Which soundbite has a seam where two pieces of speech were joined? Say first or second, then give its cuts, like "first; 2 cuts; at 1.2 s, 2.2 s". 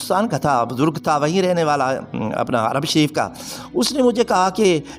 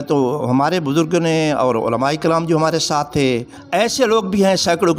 second; 1 cut; at 3.5 s